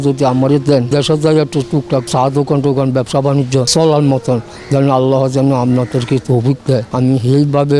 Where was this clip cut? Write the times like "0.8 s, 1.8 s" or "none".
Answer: 0.9 s, 2.1 s, 3.7 s, 6.9 s